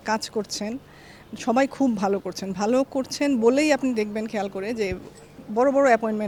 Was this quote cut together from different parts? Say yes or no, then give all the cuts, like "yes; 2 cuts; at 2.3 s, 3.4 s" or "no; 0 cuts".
no; 0 cuts